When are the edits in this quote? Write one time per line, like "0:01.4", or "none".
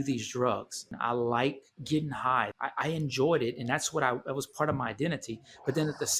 0:00.9
0:02.5

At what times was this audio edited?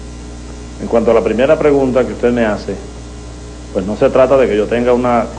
none

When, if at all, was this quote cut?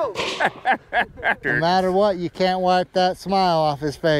0:01.4

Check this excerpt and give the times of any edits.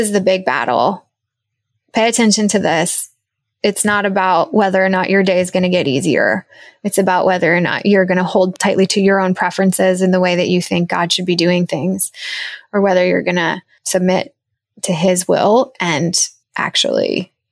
0:08.6

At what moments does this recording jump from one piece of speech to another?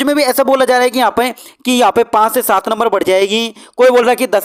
none

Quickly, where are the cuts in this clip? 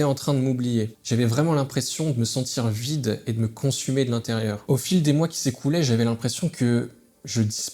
0:01.0
0:04.6

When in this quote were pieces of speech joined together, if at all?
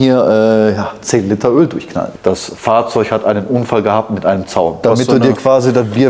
0:02.0
0:04.8

